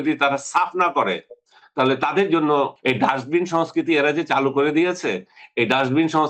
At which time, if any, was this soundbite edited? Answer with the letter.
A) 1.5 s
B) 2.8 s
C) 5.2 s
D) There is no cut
B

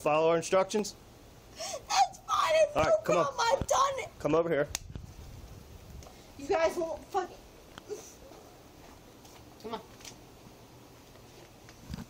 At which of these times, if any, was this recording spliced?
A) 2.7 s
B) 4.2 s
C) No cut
C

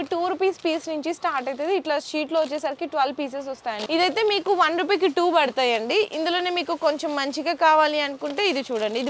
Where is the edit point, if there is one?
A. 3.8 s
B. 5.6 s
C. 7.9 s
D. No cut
A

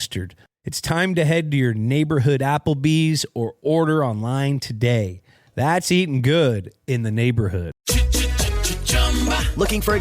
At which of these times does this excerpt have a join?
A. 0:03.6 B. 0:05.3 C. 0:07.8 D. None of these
C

